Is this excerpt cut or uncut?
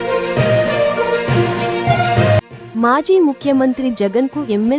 uncut